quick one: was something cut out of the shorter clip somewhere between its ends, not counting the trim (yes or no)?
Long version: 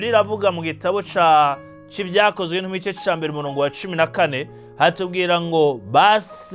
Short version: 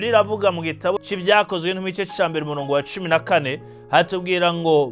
yes